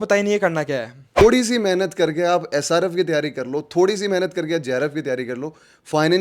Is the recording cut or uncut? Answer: cut